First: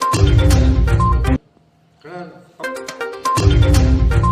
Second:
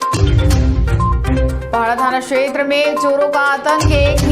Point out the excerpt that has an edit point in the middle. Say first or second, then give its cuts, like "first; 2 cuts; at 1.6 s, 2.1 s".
second; 1 cut; at 1.2 s